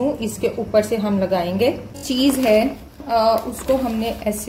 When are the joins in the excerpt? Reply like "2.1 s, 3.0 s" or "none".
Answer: 2.0 s